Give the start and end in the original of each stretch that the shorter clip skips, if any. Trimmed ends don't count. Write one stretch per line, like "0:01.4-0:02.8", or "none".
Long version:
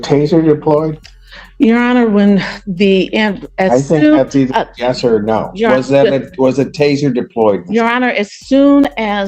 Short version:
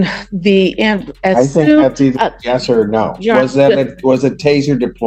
none